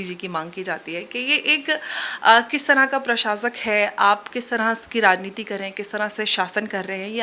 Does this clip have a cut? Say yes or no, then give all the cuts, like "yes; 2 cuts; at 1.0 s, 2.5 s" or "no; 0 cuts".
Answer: no; 0 cuts